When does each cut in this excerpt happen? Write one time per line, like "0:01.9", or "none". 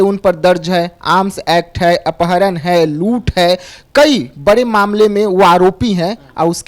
none